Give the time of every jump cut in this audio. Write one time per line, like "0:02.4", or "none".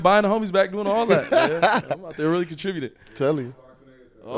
none